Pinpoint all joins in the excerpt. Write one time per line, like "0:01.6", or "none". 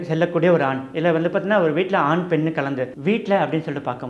0:02.9